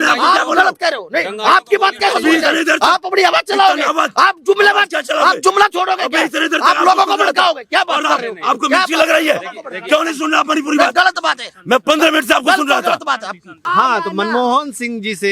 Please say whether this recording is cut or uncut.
cut